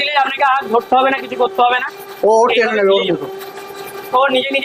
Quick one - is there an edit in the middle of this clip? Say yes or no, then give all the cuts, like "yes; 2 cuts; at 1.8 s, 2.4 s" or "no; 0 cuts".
no; 0 cuts